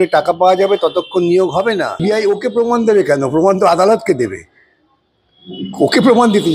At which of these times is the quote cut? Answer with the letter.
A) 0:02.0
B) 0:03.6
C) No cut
A